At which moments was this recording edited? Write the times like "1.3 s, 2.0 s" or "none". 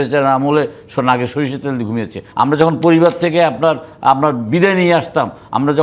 2.2 s